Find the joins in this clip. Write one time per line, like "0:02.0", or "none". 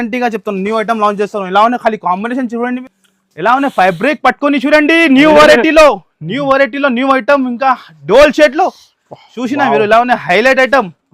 0:02.8